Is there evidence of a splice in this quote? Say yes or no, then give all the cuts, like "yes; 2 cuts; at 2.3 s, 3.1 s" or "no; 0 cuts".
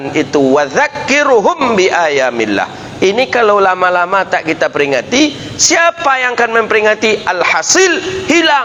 no; 0 cuts